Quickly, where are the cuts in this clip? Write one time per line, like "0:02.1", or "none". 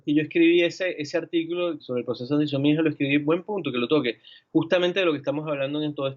0:01.8